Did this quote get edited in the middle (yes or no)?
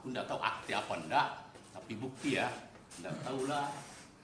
no